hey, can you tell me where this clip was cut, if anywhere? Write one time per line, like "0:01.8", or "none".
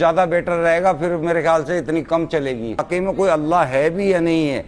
0:02.8